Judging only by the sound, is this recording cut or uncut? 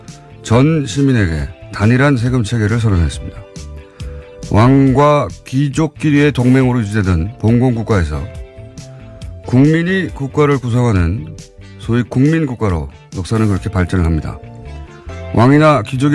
uncut